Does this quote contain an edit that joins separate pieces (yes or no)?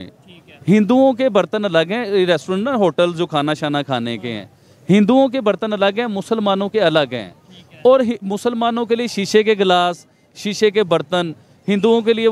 no